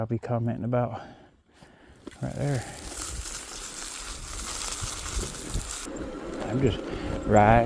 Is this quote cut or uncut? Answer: cut